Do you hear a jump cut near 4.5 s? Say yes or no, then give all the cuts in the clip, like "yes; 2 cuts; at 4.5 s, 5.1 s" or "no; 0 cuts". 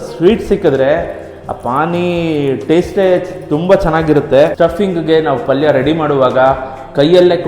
yes; 1 cut; at 4.5 s